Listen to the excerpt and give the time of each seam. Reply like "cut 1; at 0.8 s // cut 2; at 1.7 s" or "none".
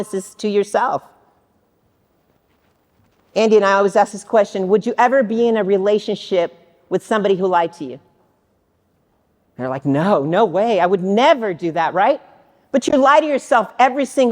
none